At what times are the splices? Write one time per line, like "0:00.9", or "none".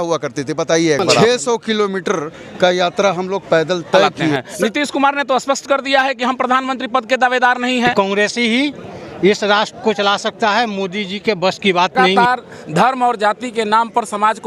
0:01.2
0:04.4
0:07.9
0:12.0